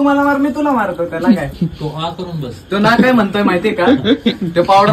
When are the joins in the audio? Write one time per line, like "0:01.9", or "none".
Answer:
none